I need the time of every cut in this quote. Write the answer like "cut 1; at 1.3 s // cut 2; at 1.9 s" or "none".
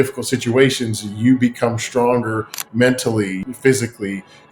cut 1; at 3.4 s

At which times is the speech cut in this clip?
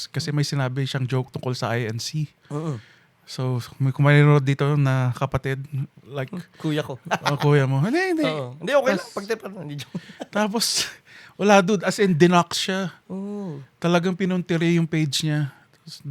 none

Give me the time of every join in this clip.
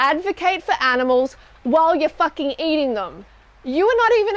none

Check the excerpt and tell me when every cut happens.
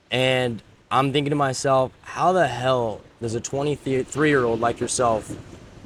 none

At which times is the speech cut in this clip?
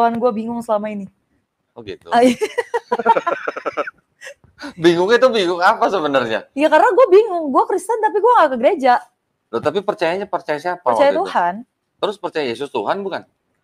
none

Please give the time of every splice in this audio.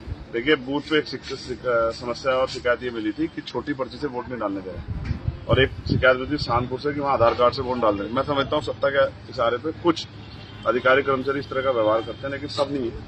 none

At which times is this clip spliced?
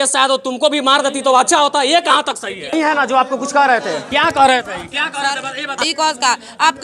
cut 1; at 2.7 s // cut 2; at 5.8 s

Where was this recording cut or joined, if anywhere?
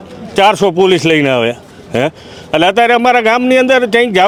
none

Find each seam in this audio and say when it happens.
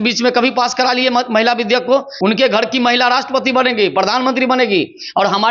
cut 1; at 2.1 s

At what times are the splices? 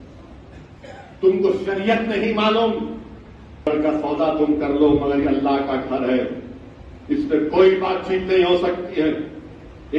cut 1; at 3.7 s

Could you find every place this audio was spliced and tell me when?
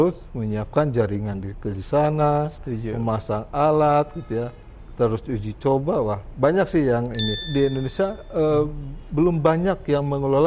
cut 1; at 7.4 s

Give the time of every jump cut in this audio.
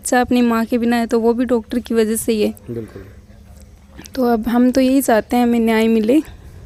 none

